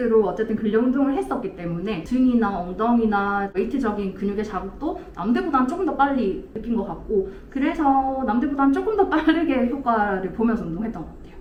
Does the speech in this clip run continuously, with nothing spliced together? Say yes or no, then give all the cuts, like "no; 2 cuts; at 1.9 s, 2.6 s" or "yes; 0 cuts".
yes; 0 cuts